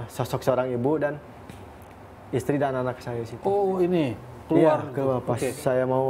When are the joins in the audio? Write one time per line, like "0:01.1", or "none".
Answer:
none